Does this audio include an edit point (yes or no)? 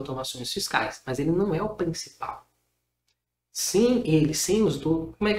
no